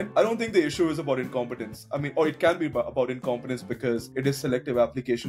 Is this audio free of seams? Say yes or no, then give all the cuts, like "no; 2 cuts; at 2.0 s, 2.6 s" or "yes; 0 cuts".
yes; 0 cuts